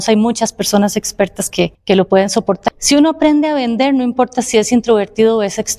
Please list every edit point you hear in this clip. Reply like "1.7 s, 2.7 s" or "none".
1.8 s, 2.6 s